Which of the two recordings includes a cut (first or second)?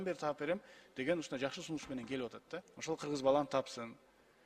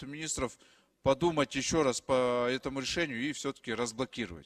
first